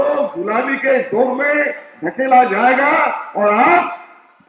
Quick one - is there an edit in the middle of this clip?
no; 0 cuts

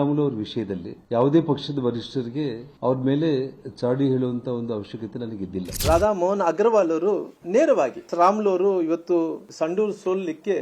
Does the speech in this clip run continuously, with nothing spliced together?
no; 3 cuts; at 1.0 s, 8.0 s, 9.4 s

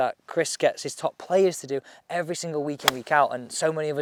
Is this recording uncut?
yes; 0 cuts

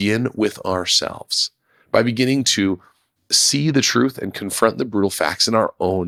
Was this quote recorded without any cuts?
yes; 0 cuts

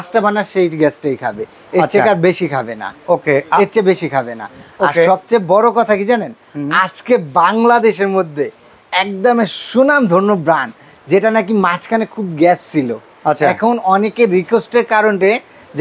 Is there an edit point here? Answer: no; 0 cuts

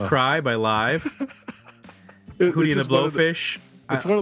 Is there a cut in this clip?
yes; 1 cut; at 2.3 s

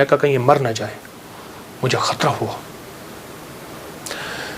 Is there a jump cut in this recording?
no; 0 cuts

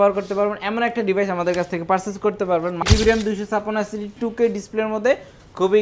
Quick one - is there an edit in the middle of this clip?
yes; 1 cut; at 2.8 s

